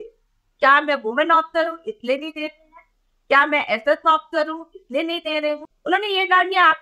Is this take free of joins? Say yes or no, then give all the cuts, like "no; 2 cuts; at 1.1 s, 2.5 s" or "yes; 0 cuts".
no; 1 cut; at 5.7 s